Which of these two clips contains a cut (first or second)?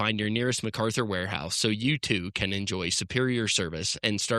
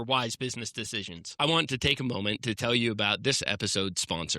second